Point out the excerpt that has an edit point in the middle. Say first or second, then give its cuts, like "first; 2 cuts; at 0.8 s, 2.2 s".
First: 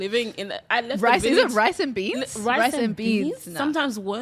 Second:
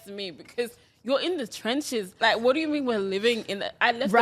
second; 1 cut; at 2.1 s